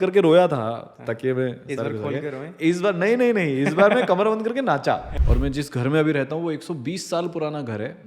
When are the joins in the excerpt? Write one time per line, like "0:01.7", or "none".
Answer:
0:05.1